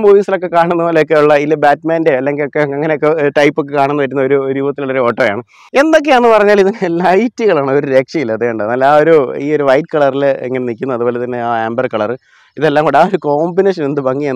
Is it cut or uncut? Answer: cut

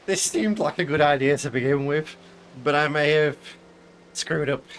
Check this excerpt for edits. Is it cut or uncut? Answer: uncut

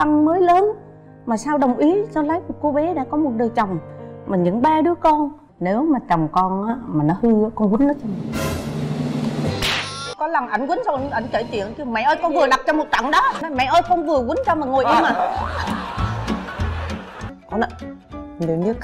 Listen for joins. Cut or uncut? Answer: cut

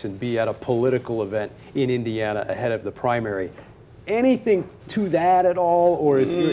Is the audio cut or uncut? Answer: cut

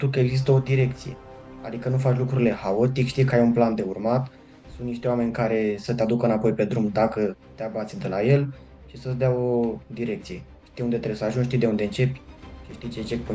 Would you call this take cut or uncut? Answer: uncut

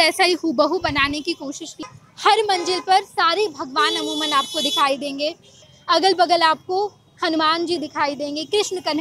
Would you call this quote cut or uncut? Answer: cut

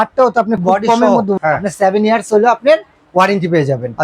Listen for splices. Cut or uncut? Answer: cut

